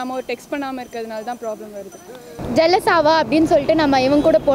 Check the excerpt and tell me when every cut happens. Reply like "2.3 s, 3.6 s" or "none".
2.3 s